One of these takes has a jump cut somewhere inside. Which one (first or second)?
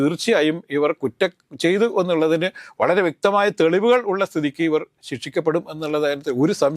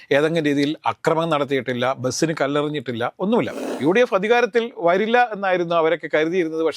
second